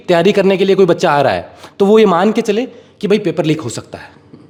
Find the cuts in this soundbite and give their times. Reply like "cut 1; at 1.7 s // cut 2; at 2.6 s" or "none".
none